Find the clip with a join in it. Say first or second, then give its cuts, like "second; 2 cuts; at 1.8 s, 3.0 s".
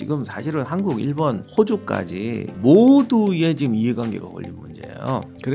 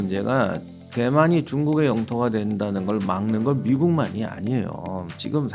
first; 2 cuts; at 1.4 s, 2.5 s